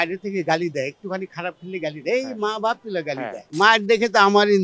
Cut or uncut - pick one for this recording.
cut